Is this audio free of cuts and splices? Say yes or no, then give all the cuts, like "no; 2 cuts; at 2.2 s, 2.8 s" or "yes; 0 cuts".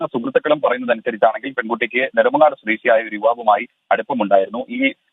yes; 0 cuts